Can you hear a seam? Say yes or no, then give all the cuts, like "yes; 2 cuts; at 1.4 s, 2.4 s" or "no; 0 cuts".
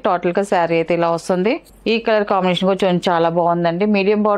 yes; 1 cut; at 1.7 s